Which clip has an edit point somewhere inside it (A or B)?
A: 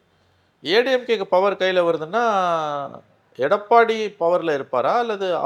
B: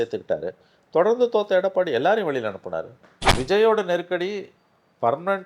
B